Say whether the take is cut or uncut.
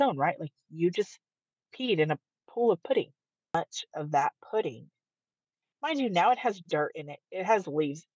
cut